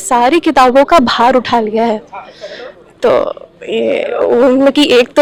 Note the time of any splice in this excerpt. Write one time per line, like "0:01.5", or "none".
none